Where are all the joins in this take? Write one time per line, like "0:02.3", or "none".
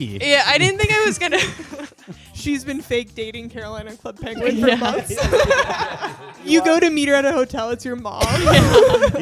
0:02.6
0:06.5